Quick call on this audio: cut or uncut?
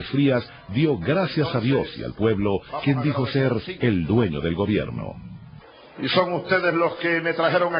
cut